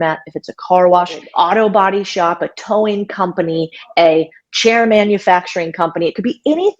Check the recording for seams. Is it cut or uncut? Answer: cut